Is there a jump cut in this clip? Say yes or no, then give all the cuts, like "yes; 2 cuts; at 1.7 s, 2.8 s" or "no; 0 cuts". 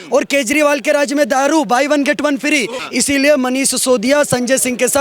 yes; 1 cut; at 2.8 s